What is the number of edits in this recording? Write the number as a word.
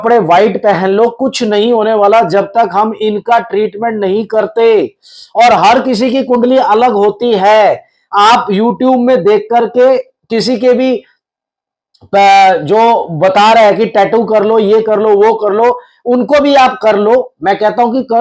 zero